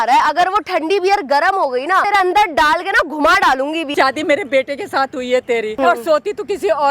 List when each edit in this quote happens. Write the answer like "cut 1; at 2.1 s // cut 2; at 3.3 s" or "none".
cut 1; at 2.1 s // cut 2; at 3.9 s // cut 3; at 5.7 s